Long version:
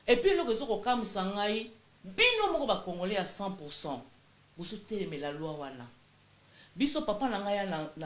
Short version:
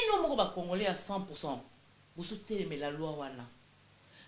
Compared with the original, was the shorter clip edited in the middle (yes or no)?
yes